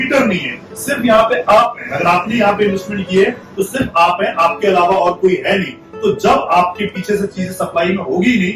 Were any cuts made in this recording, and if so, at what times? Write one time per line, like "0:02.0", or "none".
none